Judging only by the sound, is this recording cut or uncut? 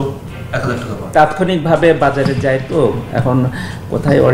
cut